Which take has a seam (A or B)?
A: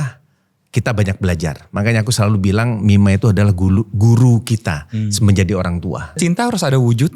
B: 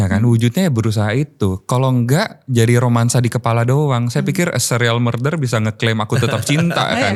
A